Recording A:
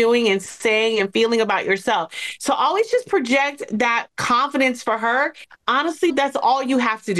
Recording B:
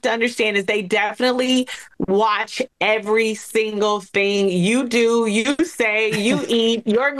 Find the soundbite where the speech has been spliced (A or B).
A